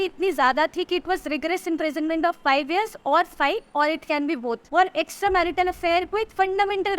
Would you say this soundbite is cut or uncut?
cut